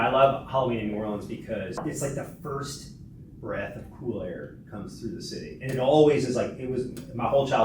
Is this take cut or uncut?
cut